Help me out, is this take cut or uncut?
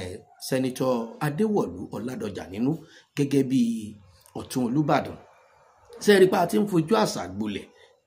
uncut